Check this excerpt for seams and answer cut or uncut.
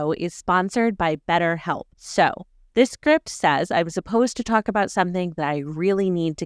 uncut